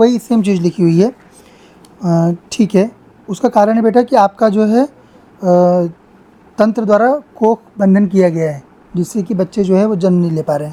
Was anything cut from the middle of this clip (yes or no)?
no